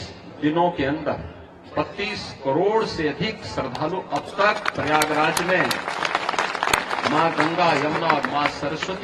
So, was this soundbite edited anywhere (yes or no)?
no